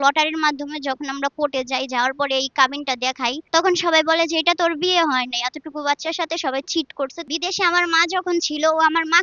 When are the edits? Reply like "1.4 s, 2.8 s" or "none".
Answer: 3.4 s, 7.2 s